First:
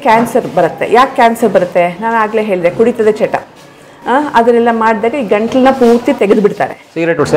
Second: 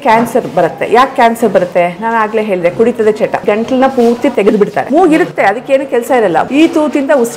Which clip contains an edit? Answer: second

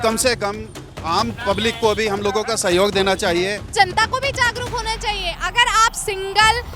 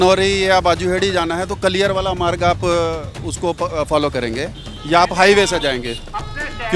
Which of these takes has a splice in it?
first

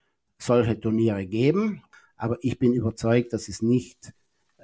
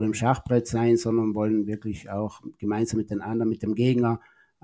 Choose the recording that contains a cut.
first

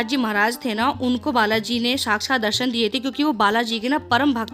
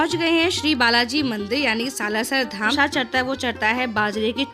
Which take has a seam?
second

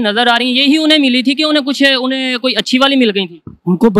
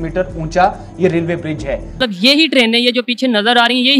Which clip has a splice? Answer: second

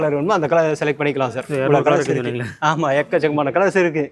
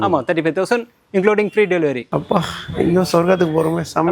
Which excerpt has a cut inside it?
second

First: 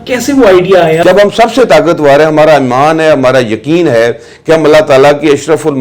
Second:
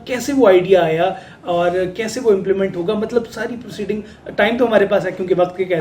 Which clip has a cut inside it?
first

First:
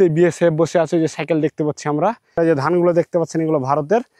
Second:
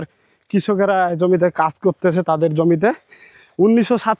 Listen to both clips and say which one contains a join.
first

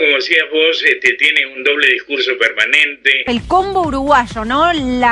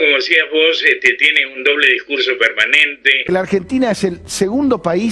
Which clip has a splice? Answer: second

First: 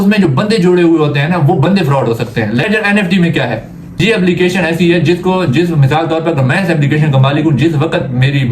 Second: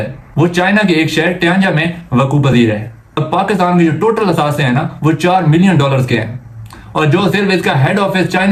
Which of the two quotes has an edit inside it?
first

